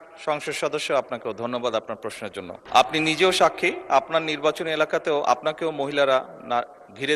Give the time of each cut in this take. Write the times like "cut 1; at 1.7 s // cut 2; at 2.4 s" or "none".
cut 1; at 2.6 s